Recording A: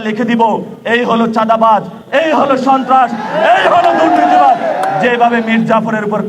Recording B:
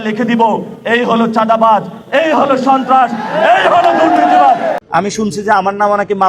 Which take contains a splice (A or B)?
B